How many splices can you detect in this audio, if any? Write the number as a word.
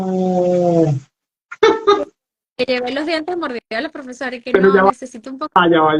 zero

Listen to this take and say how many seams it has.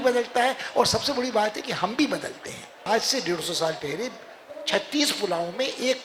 one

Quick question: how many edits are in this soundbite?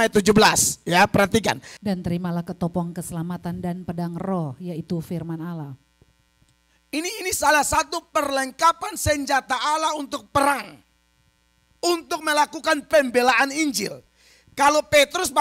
one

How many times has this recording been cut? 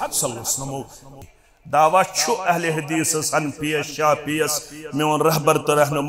one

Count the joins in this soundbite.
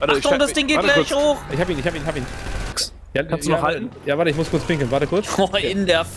one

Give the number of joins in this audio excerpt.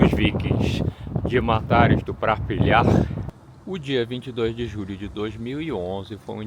one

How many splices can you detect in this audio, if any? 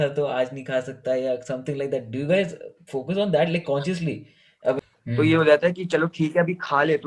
one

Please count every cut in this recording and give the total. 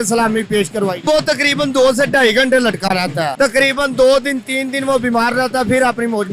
two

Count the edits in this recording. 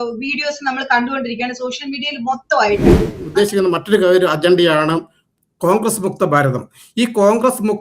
one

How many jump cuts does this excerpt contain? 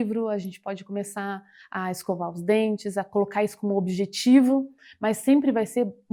zero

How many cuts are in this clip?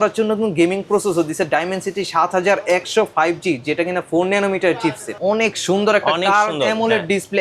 one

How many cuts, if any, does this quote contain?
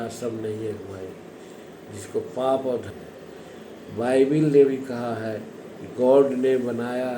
one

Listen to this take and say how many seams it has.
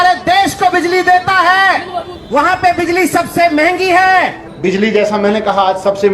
one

